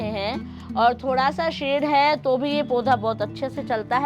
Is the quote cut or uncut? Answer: uncut